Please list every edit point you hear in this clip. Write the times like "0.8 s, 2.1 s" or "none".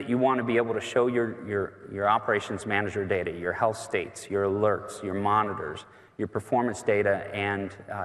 none